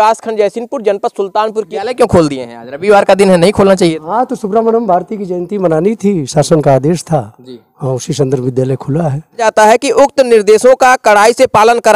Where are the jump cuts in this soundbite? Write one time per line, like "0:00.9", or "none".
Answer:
0:01.7
0:09.4